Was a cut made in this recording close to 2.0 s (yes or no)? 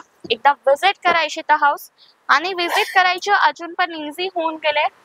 no